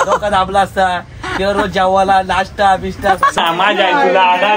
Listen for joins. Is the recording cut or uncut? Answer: cut